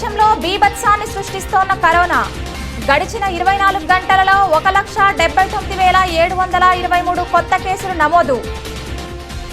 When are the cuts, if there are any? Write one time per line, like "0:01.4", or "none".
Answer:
none